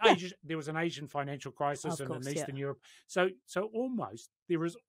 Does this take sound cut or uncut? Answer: uncut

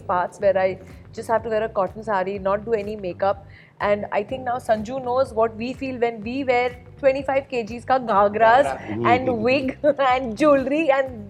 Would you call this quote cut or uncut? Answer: uncut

